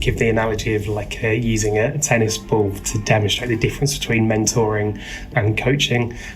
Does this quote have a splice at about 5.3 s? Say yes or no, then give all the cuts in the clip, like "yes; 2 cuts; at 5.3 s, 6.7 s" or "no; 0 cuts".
yes; 1 cut; at 5.3 s